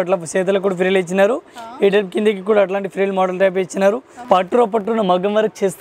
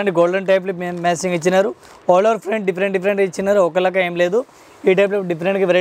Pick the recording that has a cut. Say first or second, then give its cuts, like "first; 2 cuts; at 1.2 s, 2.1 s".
first; 1 cut; at 4.1 s